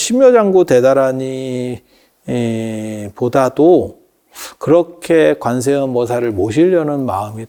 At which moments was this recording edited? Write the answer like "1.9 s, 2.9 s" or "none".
none